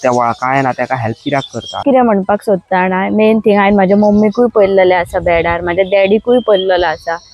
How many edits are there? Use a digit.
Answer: 1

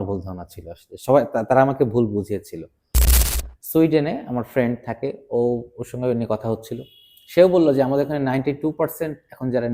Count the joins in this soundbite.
1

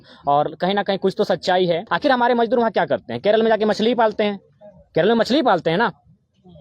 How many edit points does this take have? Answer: 1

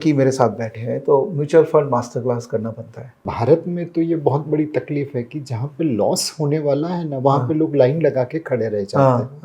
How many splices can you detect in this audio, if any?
1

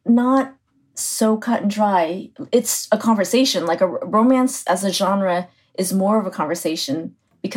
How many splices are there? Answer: 0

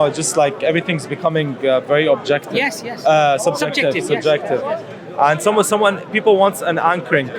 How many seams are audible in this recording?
0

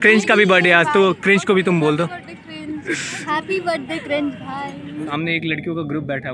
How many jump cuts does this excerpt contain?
2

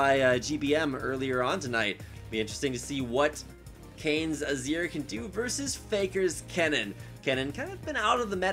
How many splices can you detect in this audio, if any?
0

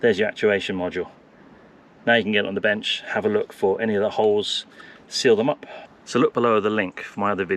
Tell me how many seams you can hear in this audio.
0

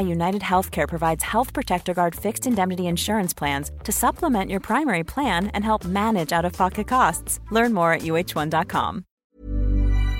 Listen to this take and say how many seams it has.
1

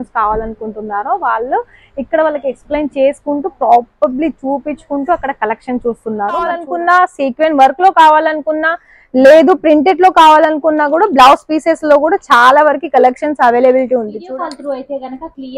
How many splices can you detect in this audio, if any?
2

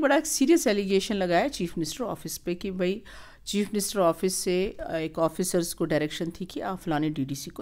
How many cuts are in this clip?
0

